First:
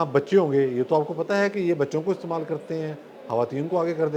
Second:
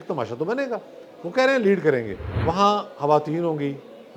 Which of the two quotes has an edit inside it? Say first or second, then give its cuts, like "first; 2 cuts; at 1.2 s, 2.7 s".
second; 1 cut; at 2.2 s